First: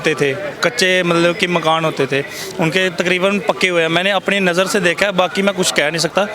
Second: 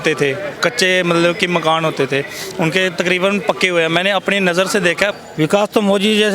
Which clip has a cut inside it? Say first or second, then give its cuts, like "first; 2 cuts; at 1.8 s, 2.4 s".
second; 1 cut; at 5.1 s